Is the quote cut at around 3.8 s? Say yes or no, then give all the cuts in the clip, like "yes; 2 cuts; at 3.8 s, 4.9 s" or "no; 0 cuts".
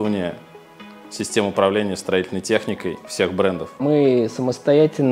yes; 1 cut; at 3.8 s